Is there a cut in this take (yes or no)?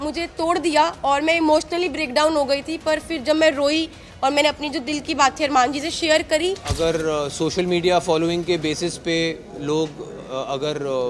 yes